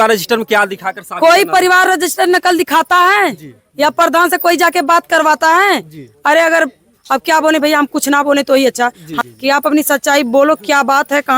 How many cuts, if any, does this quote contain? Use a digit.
1